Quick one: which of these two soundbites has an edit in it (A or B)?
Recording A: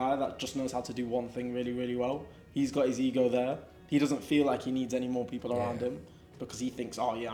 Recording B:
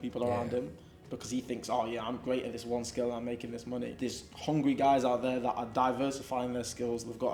B